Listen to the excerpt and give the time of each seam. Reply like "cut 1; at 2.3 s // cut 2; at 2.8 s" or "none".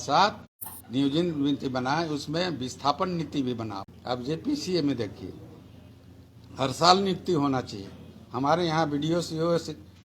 cut 1; at 3.9 s